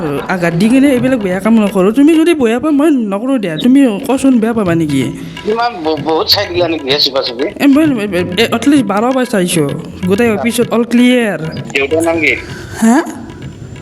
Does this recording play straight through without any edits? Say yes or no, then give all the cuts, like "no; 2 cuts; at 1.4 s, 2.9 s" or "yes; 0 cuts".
no; 1 cut; at 11.6 s